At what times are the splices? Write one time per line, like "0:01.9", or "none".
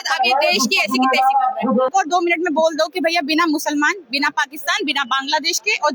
0:01.9